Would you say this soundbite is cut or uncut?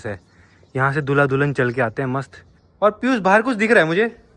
cut